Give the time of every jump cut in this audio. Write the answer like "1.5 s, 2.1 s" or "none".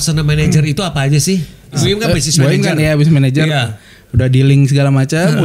1.8 s